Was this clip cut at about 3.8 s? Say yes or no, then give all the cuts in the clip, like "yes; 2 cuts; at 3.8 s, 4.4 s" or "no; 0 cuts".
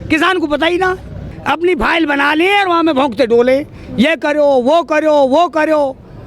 no; 1 cut; at 1.3 s